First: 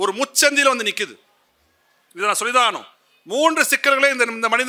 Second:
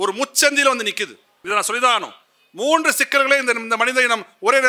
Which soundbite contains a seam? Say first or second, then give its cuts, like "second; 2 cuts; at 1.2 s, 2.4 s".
second; 1 cut; at 1.3 s